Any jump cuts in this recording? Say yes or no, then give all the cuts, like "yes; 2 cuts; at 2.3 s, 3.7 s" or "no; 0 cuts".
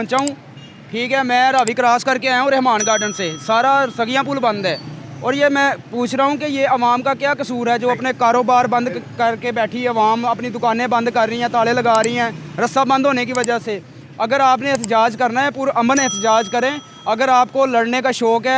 no; 0 cuts